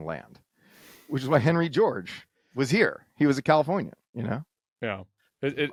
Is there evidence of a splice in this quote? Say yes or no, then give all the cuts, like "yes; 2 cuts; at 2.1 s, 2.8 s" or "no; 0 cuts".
no; 0 cuts